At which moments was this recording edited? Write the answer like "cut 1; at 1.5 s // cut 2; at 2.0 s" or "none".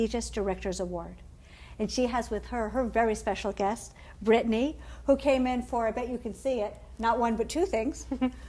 cut 1; at 6.1 s